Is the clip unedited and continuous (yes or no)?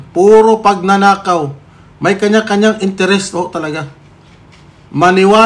yes